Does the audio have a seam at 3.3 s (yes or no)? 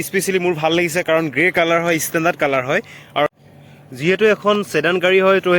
yes